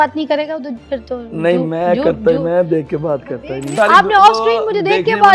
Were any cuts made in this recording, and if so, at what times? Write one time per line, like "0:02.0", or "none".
0:03.7